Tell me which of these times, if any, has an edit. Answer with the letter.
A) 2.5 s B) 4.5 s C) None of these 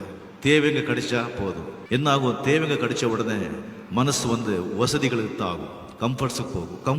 C